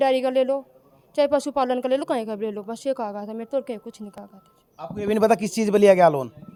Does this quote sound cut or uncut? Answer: uncut